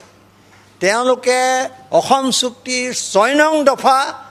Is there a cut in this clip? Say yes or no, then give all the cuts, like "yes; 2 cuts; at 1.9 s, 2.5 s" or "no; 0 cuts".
no; 0 cuts